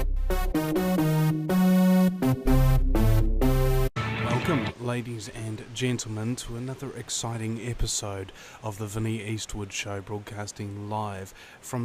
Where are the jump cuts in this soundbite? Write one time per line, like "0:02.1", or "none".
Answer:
0:03.9